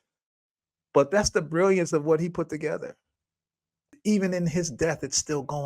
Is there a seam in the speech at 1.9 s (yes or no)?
no